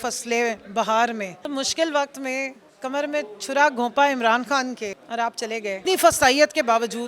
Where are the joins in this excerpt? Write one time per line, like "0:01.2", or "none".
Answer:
0:01.4
0:05.0
0:05.8